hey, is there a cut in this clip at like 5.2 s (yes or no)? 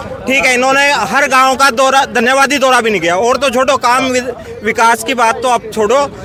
no